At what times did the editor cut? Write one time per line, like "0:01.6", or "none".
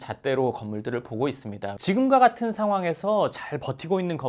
0:01.7